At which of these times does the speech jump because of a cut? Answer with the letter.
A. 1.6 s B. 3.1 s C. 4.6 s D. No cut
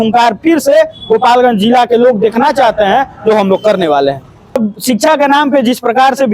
C